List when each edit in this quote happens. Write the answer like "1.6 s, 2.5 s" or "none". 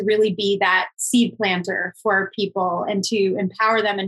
none